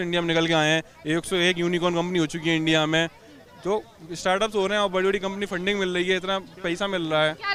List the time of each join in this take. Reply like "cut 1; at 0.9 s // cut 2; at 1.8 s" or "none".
none